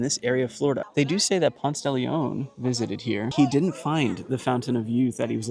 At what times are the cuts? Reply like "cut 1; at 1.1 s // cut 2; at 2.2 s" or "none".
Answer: cut 1; at 0.8 s // cut 2; at 3.3 s